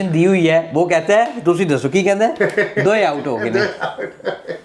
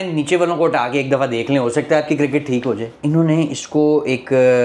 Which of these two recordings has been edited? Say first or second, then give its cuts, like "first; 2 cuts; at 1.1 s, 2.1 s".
second; 1 cut; at 2.9 s